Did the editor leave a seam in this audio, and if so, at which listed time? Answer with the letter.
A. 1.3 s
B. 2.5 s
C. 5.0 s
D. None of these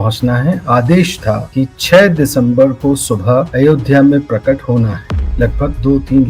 C